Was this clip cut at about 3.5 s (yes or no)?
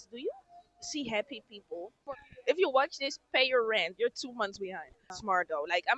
no